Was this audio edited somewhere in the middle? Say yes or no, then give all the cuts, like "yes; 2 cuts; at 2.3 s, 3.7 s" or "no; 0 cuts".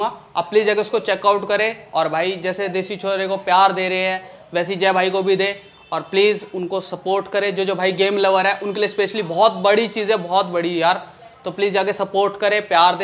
no; 0 cuts